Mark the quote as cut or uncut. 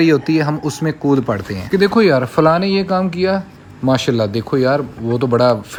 uncut